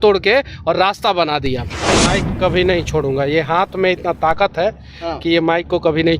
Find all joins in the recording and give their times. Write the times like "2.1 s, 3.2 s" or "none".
1.9 s